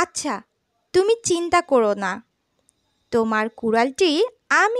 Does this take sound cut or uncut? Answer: uncut